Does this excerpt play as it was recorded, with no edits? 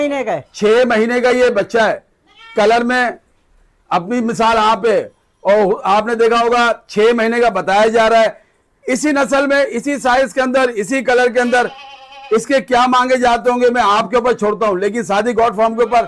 yes; 0 cuts

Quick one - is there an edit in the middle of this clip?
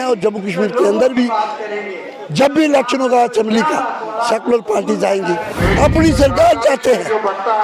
yes; 1 cut; at 5.5 s

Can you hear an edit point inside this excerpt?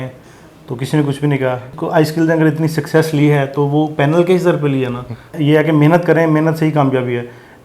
yes; 2 cuts; at 1.7 s, 5.3 s

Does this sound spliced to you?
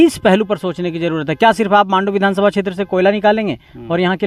no; 0 cuts

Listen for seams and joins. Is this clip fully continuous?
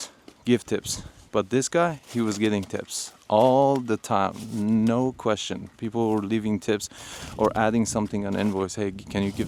yes; 0 cuts

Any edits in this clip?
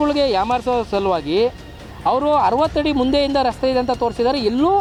no; 0 cuts

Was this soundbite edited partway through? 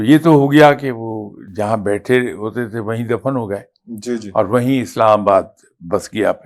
no; 0 cuts

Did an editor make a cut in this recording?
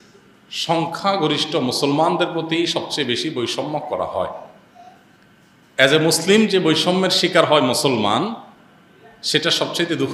no; 0 cuts

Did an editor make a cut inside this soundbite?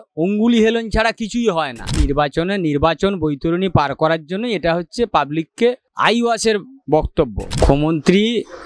yes; 3 cuts; at 1.9 s, 5.9 s, 7.4 s

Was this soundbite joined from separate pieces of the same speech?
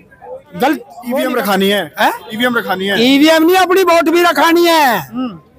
yes; 1 cut; at 1.0 s

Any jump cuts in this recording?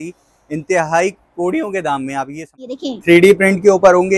yes; 1 cut; at 2.8 s

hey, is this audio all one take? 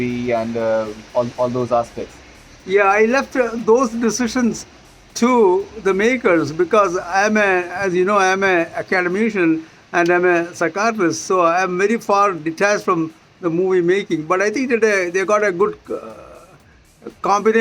yes; 0 cuts

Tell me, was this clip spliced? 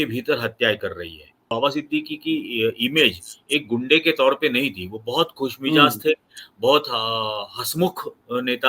yes; 1 cut; at 1.5 s

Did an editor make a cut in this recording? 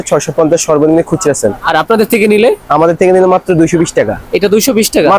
no; 0 cuts

